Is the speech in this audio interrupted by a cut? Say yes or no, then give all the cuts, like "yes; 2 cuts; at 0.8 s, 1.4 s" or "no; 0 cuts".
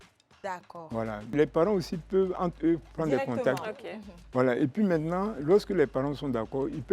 yes; 1 cut; at 1.3 s